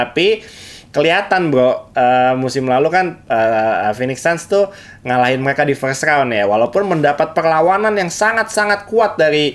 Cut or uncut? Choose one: uncut